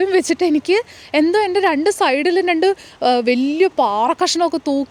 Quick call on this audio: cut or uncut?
uncut